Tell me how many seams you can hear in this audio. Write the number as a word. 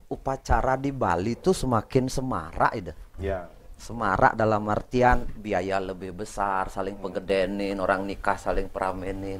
zero